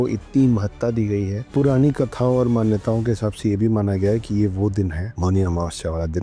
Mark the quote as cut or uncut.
cut